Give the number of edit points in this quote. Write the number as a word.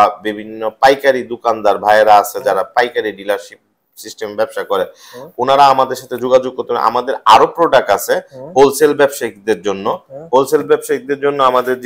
zero